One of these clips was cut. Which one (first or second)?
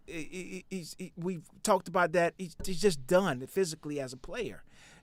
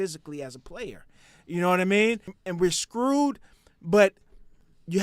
second